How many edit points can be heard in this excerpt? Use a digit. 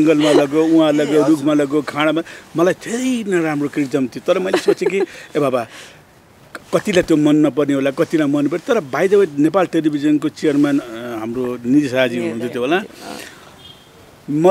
0